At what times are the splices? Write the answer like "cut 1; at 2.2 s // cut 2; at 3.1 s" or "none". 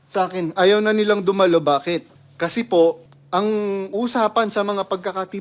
cut 1; at 2.2 s // cut 2; at 3.1 s